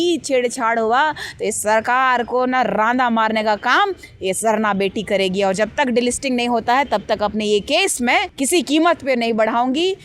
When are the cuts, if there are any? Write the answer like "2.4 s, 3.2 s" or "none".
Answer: 8.3 s

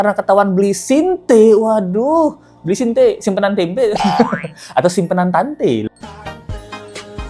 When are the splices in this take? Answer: none

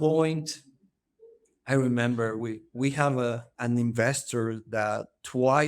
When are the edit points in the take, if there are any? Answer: 3.5 s

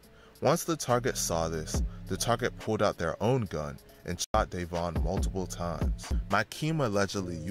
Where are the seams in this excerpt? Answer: 6.1 s

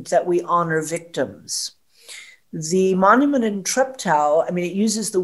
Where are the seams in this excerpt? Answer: 3.6 s

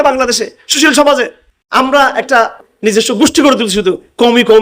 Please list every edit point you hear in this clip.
1.2 s, 2.7 s

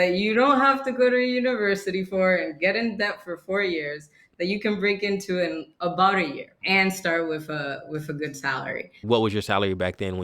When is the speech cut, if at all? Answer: 6.5 s, 9.0 s

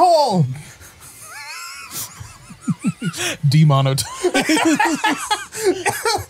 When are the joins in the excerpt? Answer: none

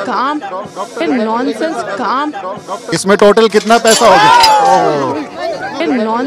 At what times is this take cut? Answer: 0.9 s, 2.8 s

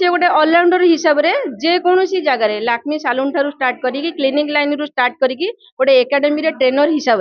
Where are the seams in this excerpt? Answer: none

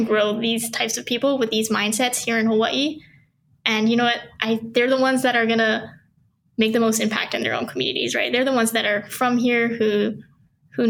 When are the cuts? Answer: none

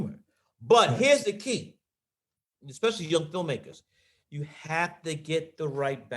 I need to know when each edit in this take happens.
2.3 s, 4.2 s

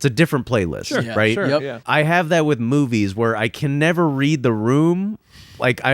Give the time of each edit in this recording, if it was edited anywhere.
1.8 s

